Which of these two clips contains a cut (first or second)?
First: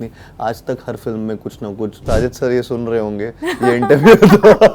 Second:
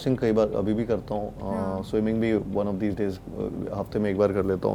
first